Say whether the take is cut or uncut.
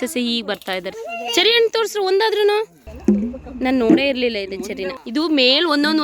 cut